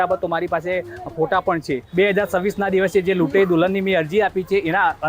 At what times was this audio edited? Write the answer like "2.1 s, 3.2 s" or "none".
1.8 s